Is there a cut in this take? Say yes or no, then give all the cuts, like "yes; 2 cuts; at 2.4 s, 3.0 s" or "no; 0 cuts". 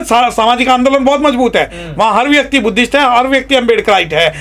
no; 0 cuts